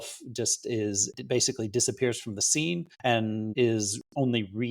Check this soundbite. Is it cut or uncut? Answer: cut